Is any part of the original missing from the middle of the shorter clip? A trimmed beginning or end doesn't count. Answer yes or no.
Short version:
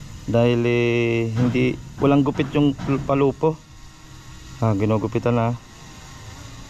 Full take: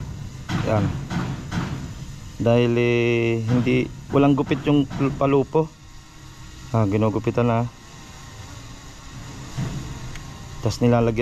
no